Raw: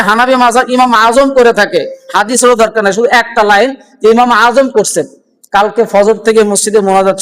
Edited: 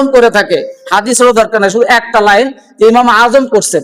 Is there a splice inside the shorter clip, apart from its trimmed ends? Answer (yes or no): no